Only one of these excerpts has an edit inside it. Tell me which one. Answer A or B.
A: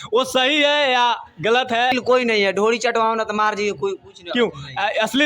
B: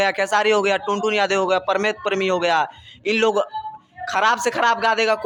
A